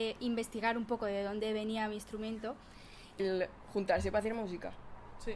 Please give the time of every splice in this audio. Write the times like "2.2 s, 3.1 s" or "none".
3.2 s

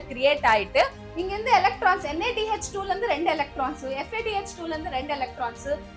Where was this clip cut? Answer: 1.0 s

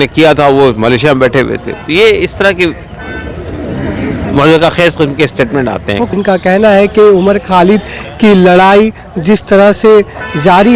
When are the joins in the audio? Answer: 6.1 s

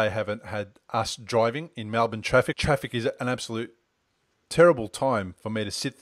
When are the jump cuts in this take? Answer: 2.5 s

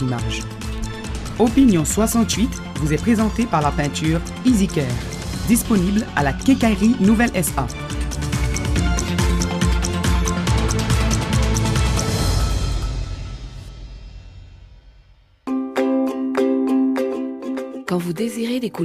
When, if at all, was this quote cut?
15.4 s

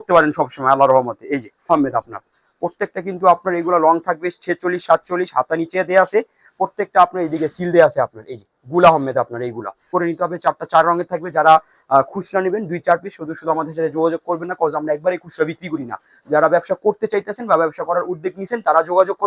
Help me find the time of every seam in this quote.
1.7 s, 9.9 s

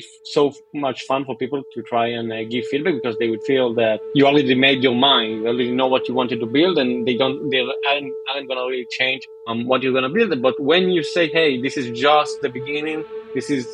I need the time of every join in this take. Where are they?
none

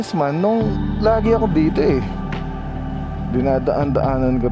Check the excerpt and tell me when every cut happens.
none

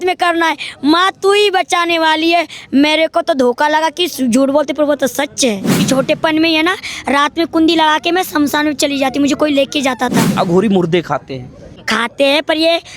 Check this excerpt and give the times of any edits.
5.8 s, 10.3 s, 11.8 s

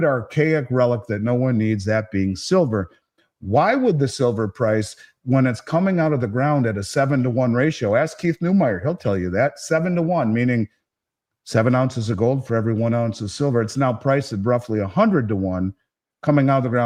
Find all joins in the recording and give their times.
none

